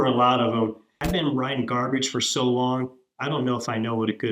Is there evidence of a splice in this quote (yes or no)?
yes